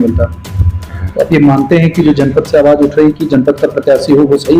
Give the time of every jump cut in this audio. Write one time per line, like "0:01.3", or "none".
0:01.0